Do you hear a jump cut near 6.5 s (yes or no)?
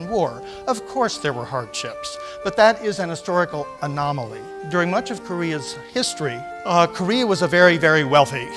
yes